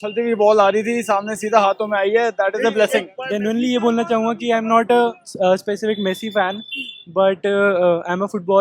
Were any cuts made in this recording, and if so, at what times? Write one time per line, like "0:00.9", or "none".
0:03.2